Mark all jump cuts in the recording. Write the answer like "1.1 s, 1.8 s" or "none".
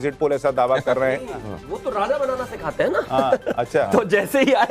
1.5 s